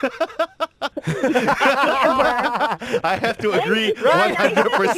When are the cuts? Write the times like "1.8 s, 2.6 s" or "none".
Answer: 0.9 s